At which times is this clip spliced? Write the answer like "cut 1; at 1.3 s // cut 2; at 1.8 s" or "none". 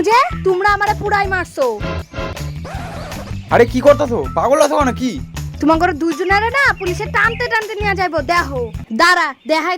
cut 1; at 8.8 s